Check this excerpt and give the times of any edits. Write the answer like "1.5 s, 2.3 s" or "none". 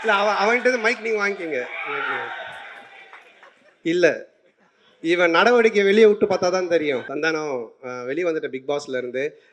7.1 s